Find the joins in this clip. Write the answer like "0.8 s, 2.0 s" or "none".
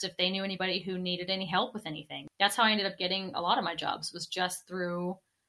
2.2 s